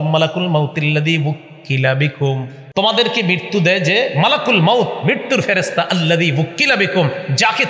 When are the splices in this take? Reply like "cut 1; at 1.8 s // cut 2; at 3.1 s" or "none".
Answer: cut 1; at 2.5 s